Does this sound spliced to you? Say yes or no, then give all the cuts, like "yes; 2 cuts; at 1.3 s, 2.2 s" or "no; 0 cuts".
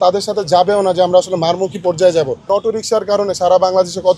yes; 1 cut; at 2.5 s